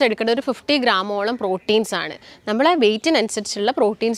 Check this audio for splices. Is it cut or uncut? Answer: uncut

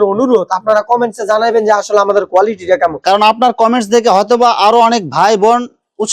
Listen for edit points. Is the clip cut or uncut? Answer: uncut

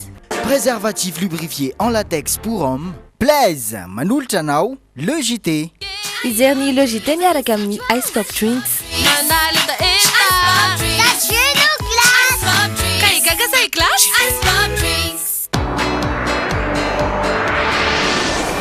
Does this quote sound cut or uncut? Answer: uncut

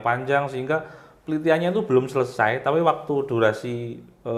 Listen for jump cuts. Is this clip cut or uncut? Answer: uncut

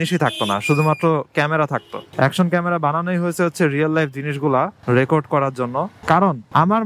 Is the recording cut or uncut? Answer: uncut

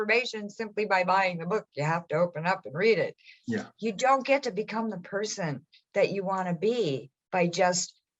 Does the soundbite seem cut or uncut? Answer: uncut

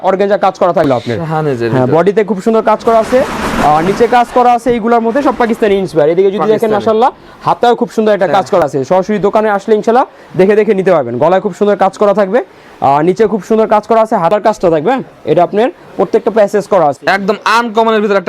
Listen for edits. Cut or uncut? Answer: cut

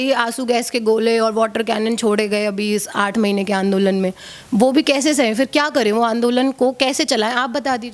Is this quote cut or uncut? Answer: uncut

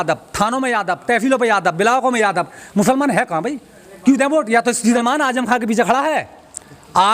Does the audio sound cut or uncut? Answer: cut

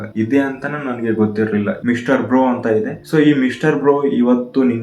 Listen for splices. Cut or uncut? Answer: cut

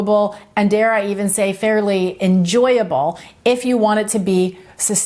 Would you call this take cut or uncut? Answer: uncut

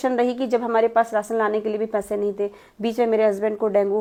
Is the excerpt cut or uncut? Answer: uncut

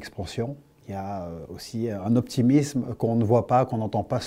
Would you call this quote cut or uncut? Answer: uncut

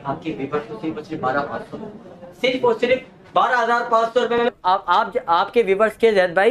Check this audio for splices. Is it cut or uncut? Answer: cut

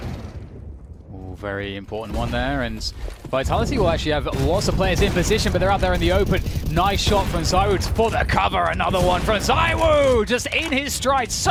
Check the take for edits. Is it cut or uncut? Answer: uncut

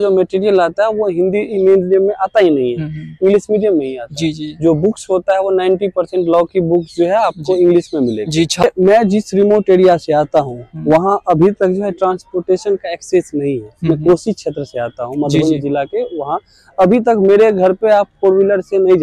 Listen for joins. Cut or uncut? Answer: cut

